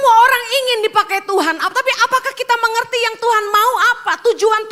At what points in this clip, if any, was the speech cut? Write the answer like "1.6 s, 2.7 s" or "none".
none